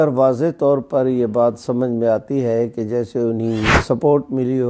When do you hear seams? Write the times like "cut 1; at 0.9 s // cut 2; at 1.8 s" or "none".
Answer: cut 1; at 3.8 s